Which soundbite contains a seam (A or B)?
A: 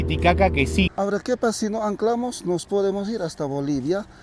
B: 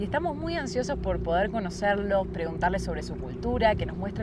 A